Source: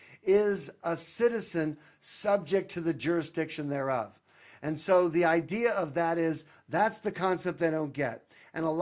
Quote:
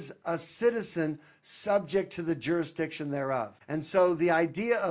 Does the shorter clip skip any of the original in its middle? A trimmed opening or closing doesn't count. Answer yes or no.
yes